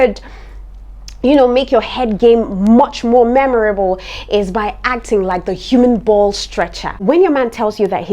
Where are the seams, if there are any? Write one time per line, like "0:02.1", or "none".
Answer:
0:06.9